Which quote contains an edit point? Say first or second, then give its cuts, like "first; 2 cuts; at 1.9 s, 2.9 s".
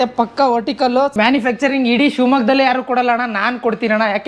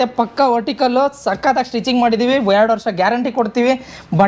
first; 1 cut; at 1.1 s